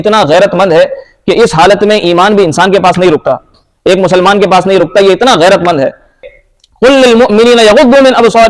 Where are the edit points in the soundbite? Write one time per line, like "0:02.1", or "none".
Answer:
0:06.3